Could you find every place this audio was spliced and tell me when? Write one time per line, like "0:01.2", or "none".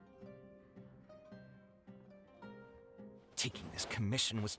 0:03.3